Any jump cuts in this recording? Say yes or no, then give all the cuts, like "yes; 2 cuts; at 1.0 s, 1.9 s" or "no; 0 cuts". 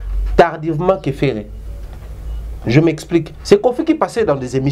no; 0 cuts